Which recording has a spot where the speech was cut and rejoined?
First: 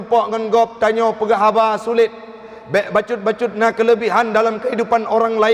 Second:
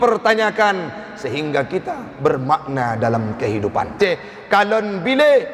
second; 1 cut; at 4.0 s

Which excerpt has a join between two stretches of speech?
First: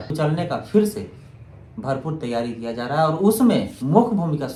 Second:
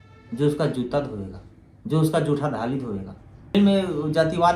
second; 1 cut; at 3.5 s

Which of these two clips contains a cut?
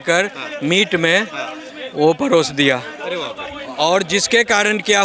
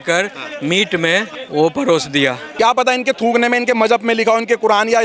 second; 2 cuts; at 1.4 s, 2.4 s

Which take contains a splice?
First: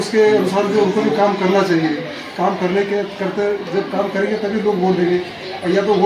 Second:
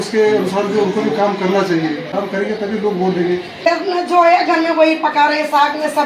second; 2 cuts; at 2.1 s, 3.7 s

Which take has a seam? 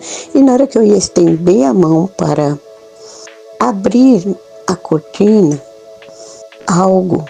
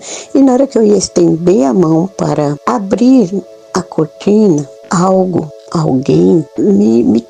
second; 4 cuts; at 2.6 s, 4.8 s, 5.6 s, 6.5 s

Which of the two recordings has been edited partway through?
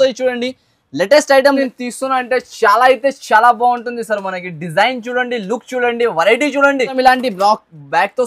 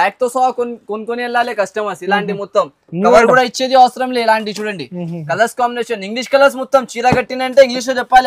first; 2 cuts; at 1.6 s, 6.9 s

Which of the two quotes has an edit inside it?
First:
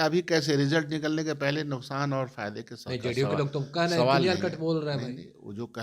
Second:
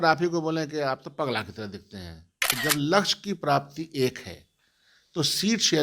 second; 1 cut; at 2.4 s

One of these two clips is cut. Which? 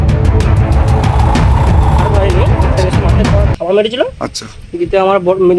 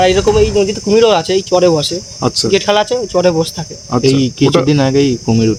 first; 1 cut; at 3.5 s

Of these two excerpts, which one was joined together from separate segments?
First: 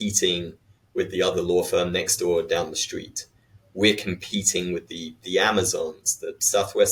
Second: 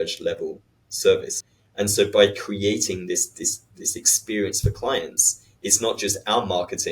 second; 1 cut; at 1.3 s

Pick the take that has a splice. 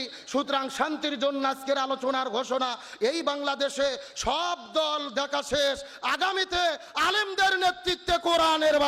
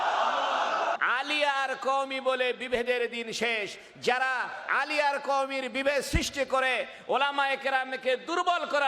second; 1 cut; at 1.0 s

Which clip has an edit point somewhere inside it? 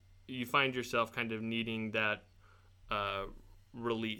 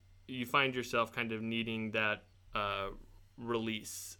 second; 1 cut; at 2.4 s

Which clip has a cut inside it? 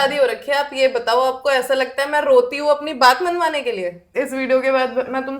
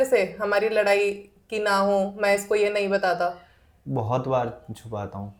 first; 1 cut; at 4.1 s

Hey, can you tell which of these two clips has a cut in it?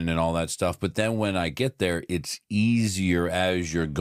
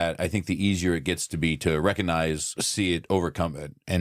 second; 1 cut; at 2.6 s

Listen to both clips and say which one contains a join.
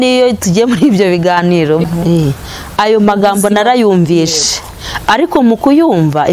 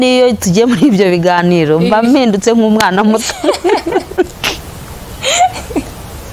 first; 1 cut; at 1.8 s

